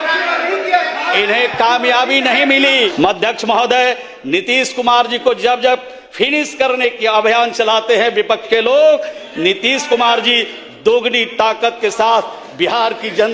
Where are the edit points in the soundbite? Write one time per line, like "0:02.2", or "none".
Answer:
0:02.9